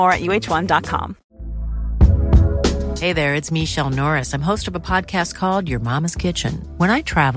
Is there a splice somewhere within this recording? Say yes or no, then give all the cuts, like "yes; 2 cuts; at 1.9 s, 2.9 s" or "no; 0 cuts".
no; 0 cuts